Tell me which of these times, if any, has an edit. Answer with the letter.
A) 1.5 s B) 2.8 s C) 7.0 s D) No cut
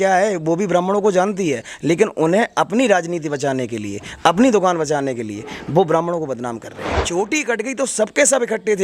C